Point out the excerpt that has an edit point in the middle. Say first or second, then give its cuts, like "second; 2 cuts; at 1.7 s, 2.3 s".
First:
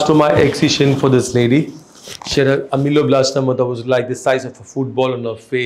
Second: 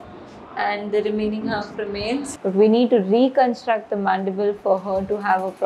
second; 1 cut; at 2.3 s